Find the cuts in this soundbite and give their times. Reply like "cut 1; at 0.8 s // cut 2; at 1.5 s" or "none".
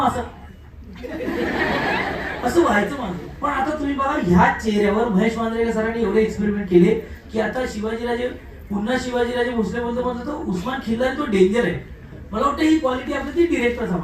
none